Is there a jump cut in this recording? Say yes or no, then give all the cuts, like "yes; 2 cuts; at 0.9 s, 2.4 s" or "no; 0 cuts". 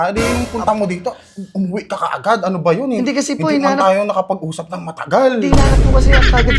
no; 0 cuts